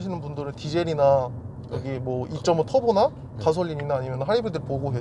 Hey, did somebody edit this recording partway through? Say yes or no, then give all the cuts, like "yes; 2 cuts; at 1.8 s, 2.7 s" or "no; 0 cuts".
no; 0 cuts